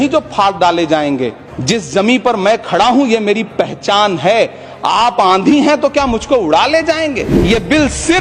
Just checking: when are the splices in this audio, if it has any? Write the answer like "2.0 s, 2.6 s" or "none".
1.5 s, 7.3 s